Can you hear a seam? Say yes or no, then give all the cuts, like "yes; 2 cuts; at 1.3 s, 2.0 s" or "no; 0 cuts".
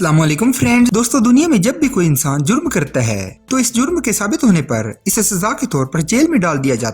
yes; 1 cut; at 0.9 s